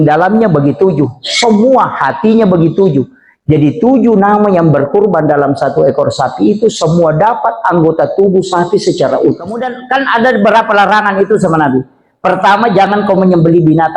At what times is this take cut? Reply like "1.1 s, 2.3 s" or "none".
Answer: 9.7 s